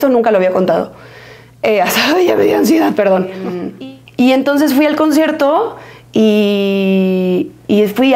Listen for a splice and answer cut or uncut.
cut